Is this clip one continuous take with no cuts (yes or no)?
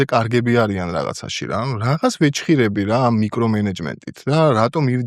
yes